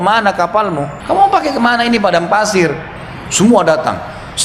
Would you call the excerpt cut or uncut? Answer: cut